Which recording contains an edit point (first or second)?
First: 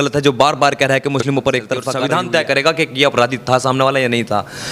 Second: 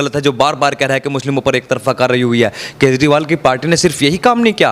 first